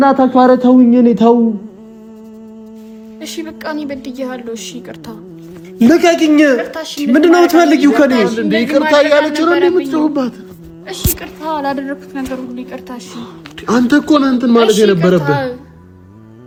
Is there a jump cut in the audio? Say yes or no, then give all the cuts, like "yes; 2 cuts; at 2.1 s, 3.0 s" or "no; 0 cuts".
no; 0 cuts